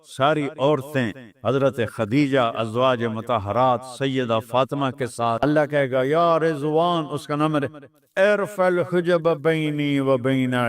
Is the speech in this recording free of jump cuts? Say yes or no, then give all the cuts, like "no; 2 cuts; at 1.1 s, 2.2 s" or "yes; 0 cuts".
no; 1 cut; at 5.4 s